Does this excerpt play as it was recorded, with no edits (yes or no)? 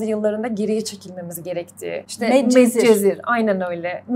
no